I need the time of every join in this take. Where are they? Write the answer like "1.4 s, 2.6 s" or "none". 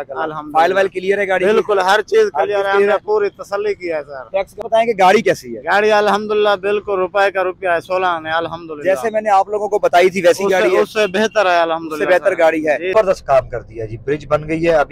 4.6 s, 12.9 s